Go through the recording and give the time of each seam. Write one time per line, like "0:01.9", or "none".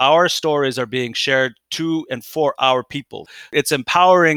0:03.4